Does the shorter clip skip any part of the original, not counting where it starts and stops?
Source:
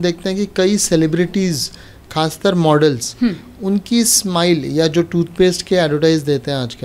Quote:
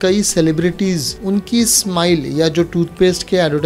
yes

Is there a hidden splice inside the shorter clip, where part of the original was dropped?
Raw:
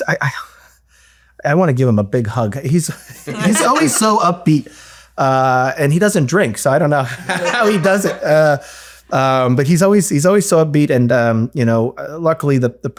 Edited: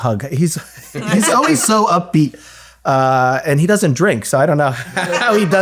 no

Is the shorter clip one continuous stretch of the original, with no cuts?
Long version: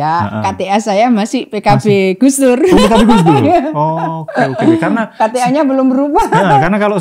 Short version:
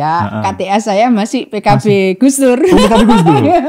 yes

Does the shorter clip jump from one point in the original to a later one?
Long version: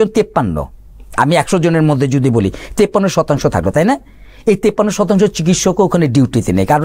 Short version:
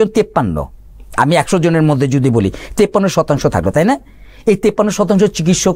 no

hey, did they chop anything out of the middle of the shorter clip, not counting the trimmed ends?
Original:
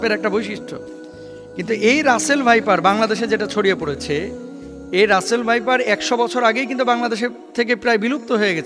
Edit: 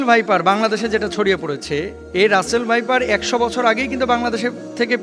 yes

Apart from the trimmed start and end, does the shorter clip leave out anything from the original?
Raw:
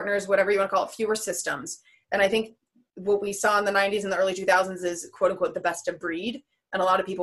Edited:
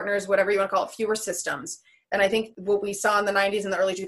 yes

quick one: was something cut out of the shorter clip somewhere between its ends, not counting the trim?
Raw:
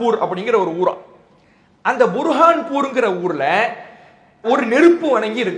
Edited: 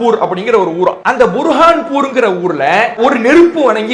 yes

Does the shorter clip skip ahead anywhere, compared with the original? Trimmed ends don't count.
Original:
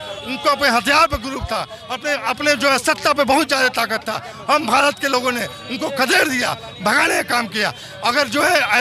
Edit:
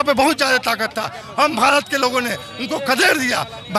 no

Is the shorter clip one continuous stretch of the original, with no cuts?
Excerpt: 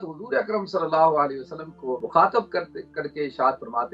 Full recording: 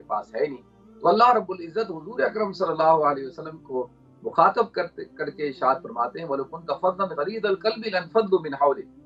no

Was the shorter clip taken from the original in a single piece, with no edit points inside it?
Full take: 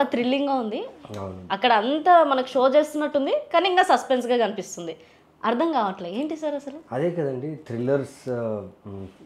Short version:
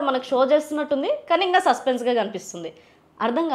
yes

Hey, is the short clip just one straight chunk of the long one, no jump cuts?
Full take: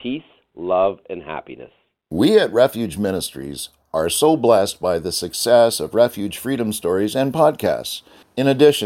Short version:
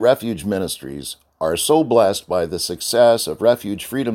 yes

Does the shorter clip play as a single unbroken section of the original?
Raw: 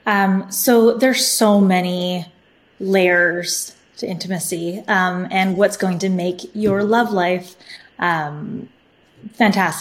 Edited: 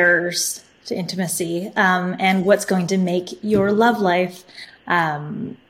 yes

